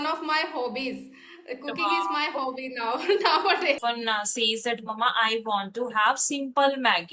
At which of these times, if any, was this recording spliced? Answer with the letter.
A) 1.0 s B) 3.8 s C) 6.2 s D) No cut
B